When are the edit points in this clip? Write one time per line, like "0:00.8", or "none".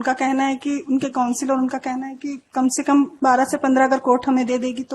0:03.1